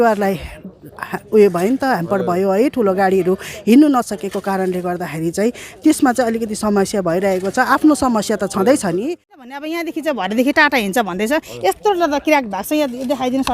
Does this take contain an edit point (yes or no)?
yes